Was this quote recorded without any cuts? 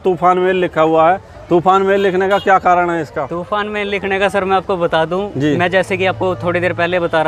yes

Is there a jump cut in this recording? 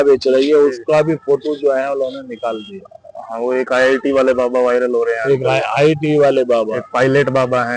no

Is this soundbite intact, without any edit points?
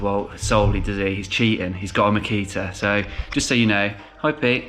yes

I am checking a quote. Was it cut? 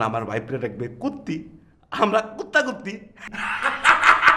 no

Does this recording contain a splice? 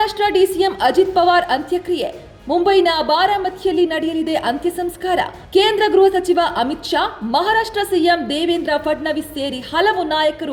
no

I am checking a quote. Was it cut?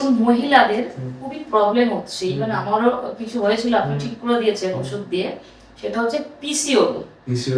no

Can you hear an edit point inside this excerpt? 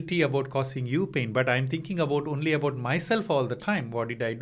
no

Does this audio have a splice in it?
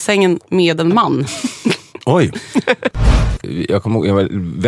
yes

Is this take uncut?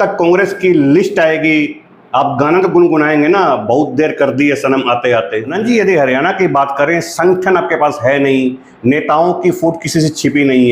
no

